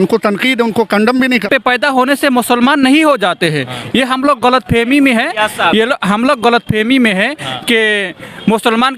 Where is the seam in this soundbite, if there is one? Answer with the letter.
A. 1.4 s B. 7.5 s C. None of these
A